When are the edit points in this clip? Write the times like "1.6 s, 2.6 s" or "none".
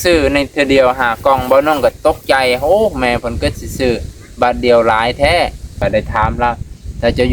5.8 s